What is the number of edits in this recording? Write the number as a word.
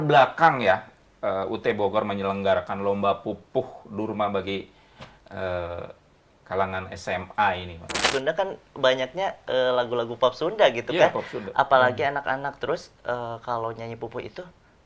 one